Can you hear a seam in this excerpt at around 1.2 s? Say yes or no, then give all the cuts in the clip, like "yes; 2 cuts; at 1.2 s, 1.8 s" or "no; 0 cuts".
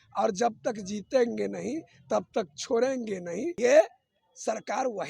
no; 1 cut; at 3.6 s